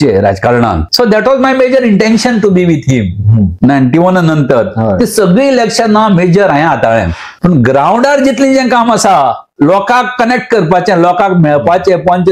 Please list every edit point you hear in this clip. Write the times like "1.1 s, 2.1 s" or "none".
0.8 s, 3.5 s, 7.2 s